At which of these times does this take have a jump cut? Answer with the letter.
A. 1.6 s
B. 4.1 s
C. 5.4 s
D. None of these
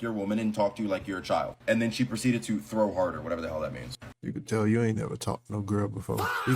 B